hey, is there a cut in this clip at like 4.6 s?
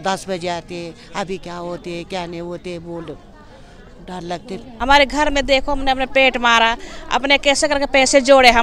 yes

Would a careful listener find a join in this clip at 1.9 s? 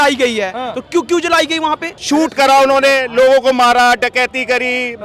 yes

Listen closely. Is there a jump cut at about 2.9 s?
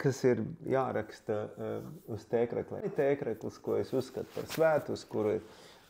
yes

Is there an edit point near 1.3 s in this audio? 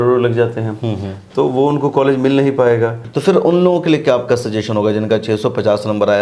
no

